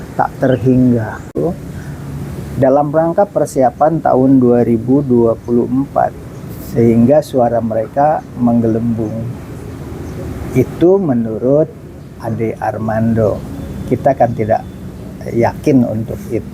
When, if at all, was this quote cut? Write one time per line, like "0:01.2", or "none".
0:01.4